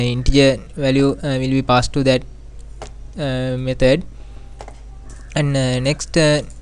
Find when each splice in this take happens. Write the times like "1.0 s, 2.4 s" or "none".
none